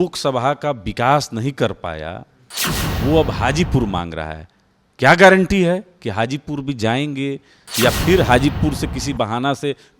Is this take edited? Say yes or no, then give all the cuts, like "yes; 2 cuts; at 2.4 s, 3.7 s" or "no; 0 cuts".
yes; 1 cut; at 7.6 s